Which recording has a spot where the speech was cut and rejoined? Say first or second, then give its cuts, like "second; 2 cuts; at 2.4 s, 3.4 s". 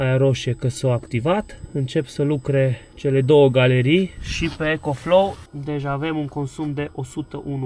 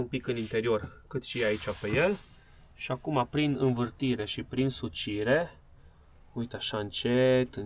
first; 4 cuts; at 1.6 s, 2.9 s, 4.2 s, 5.4 s